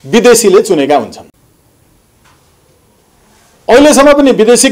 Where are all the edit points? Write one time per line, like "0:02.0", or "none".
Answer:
none